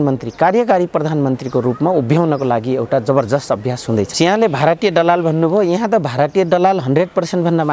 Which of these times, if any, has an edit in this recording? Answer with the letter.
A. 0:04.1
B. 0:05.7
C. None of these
A